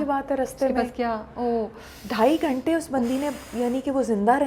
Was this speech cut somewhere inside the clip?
no; 0 cuts

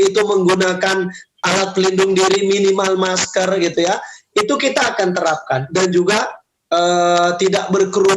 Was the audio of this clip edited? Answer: yes; 1 cut; at 1.4 s

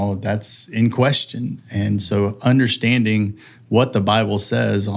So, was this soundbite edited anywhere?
yes; 1 cut; at 2.4 s

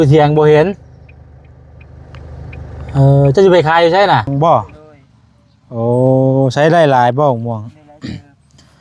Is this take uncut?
no; 1 cut; at 4.3 s

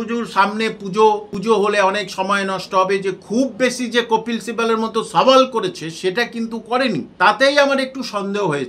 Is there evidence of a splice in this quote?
yes; 2 cuts; at 1.3 s, 7.1 s

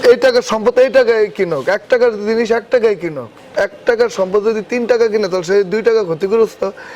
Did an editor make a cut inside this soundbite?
no; 0 cuts

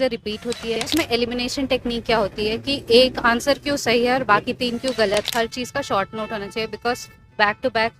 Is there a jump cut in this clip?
yes; 2 cuts; at 0.9 s, 5.1 s

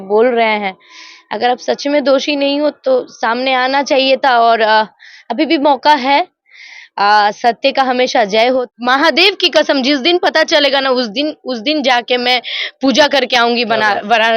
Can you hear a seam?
yes; 1 cut; at 8.7 s

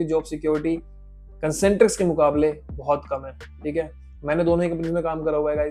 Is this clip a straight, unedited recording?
yes; 0 cuts

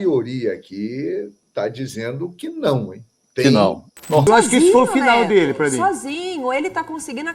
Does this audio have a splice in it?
yes; 1 cut; at 4.2 s

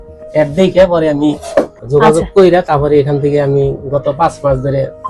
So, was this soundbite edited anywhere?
yes; 1 cut; at 1.8 s

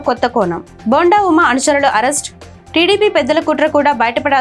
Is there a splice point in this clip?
no; 0 cuts

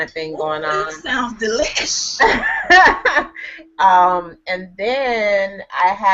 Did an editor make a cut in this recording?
yes; 1 cut; at 4.7 s

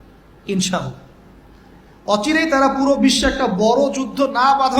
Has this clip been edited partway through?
no; 0 cuts

